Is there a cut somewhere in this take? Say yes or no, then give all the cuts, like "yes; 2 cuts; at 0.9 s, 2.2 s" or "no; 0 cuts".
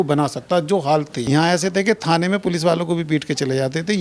yes; 1 cut; at 1.2 s